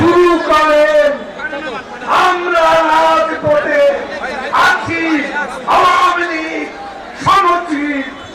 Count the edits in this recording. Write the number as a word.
zero